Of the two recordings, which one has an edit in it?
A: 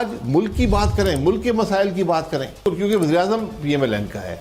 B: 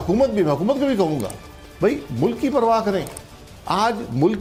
A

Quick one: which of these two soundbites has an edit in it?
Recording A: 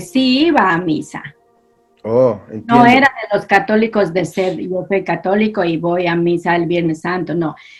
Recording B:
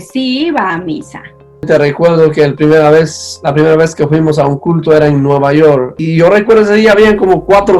B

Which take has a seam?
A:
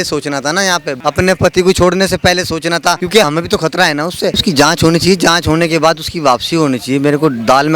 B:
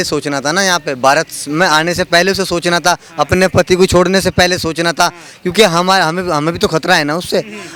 A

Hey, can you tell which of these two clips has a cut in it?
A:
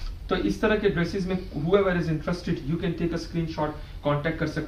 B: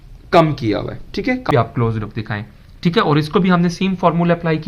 B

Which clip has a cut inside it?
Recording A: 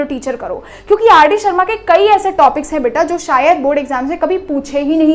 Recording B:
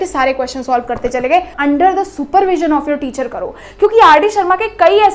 B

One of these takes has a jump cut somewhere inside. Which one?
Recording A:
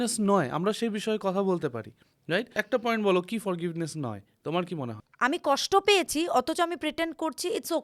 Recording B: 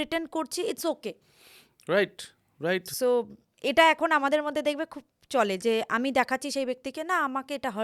A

